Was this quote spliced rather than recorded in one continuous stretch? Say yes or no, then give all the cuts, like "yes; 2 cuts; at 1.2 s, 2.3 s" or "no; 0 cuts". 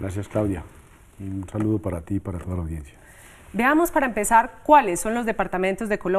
yes; 1 cut; at 2.3 s